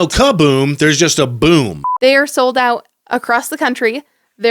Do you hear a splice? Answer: yes; 1 cut; at 1.8 s

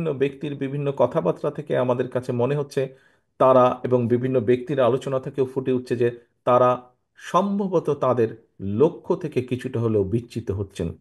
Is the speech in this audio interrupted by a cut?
no; 0 cuts

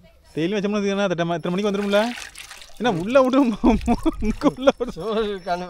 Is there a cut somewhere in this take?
no; 0 cuts

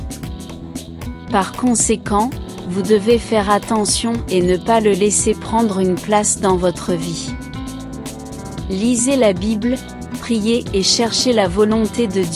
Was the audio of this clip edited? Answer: yes; 2 cuts; at 7.2 s, 8.7 s

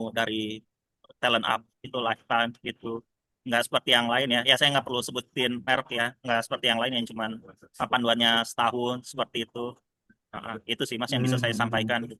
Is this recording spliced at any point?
no; 0 cuts

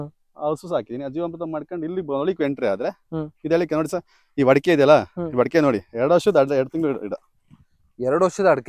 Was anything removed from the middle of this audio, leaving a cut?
no; 0 cuts

